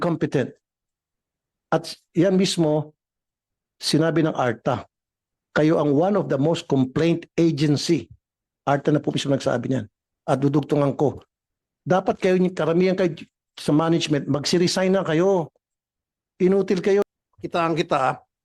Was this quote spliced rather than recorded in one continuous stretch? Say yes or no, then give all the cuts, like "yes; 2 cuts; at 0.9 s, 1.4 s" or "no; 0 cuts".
yes; 1 cut; at 17.0 s